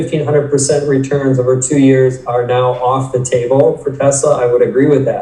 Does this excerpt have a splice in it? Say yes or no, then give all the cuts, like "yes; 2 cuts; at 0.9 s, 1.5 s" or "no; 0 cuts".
no; 0 cuts